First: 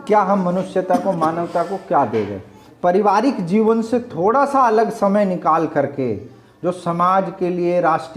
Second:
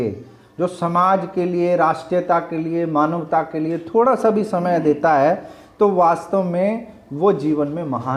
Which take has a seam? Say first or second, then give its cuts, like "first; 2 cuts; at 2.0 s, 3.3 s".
first; 1 cut; at 2.6 s